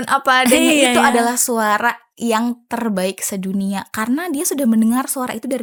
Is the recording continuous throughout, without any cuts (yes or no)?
yes